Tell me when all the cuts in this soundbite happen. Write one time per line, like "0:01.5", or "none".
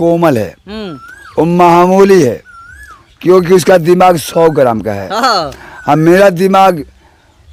none